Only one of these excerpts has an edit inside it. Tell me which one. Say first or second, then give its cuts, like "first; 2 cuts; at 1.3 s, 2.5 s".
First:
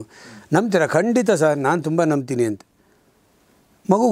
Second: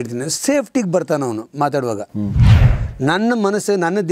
second; 1 cut; at 2.4 s